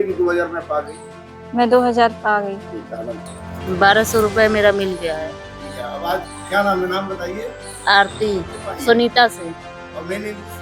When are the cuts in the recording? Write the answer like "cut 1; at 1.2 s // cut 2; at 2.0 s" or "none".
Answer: cut 1; at 8.6 s